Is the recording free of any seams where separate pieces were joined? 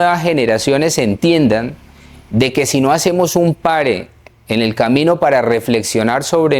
yes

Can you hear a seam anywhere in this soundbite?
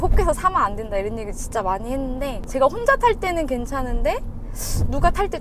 no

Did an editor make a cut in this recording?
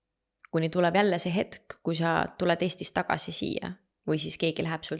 no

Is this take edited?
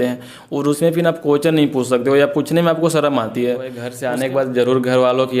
yes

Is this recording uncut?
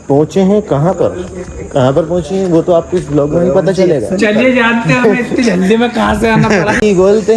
yes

